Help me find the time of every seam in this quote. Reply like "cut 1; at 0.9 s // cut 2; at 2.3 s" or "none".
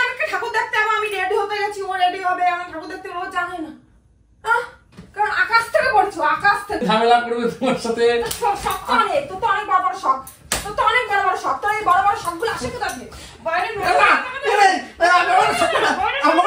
cut 1; at 6.8 s